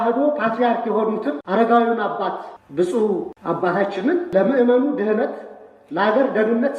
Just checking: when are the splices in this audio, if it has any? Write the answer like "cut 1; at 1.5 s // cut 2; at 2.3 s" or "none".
cut 1; at 1.4 s // cut 2; at 2.5 s // cut 3; at 3.3 s // cut 4; at 4.3 s